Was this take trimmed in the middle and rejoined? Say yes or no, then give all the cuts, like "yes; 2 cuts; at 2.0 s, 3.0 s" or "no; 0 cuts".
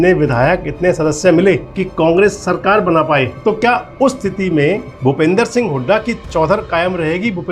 yes; 3 cuts; at 1.8 s, 3.3 s, 4.9 s